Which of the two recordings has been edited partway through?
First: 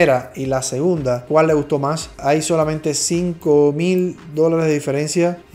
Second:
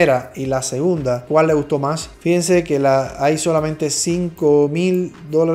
first; 1 cut; at 2.1 s

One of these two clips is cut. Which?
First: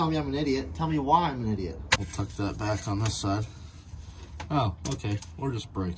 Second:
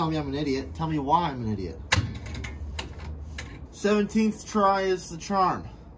first; 1 cut; at 2.0 s

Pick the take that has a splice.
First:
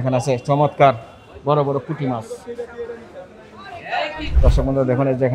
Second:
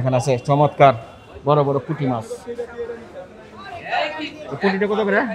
first; 1 cut; at 4.2 s

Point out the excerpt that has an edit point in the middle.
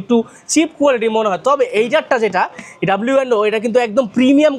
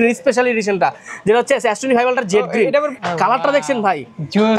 second; 1 cut; at 2.9 s

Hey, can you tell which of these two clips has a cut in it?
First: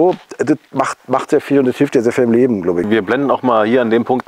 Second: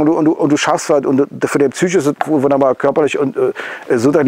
first; 1 cut; at 2.9 s

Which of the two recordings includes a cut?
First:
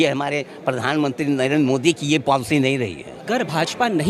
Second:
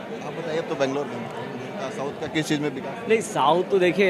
first; 1 cut; at 3.1 s

